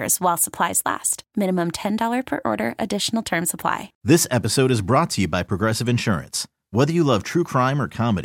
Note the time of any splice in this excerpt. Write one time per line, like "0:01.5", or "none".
0:03.9